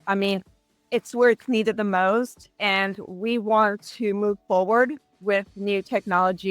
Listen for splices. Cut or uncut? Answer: uncut